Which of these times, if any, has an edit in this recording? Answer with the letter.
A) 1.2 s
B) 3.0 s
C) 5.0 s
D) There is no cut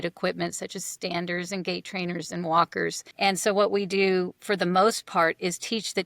B